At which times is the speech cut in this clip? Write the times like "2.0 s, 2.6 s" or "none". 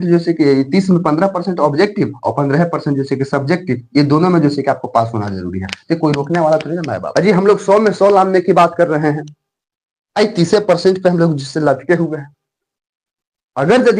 7.0 s